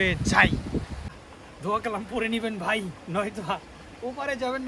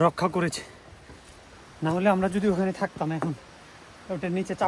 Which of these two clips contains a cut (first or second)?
first